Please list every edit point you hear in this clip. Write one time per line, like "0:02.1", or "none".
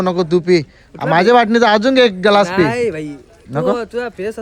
none